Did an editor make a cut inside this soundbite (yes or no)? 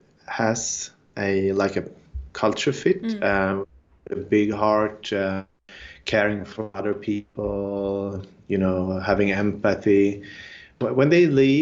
no